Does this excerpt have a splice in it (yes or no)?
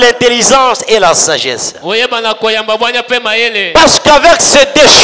no